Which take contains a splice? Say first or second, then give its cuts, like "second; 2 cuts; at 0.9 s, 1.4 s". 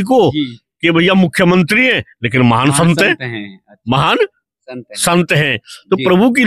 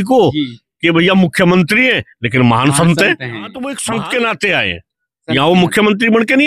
second; 1 cut; at 3.6 s